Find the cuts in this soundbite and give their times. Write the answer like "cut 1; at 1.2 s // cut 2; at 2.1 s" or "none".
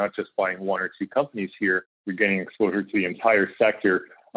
cut 1; at 2.0 s // cut 2; at 3.2 s

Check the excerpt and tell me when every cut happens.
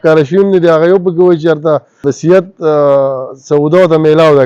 cut 1; at 2.1 s

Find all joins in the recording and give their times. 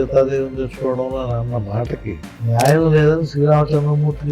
cut 1; at 2.3 s

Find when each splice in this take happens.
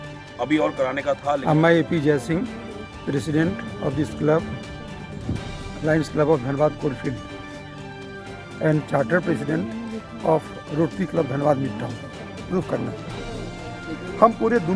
cut 1; at 1.4 s // cut 2; at 12.5 s

